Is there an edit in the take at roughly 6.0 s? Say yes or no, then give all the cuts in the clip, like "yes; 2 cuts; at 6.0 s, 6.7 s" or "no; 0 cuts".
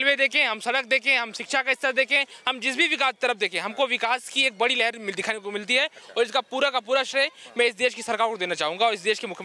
no; 0 cuts